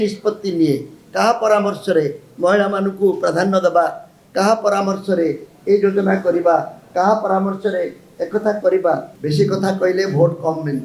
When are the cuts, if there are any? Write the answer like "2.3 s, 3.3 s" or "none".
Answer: 9.1 s